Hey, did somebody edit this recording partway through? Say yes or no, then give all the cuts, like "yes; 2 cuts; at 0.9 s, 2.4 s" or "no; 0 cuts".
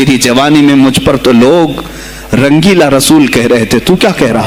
no; 0 cuts